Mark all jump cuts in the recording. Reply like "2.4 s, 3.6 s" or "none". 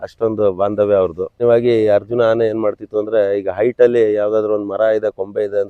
1.4 s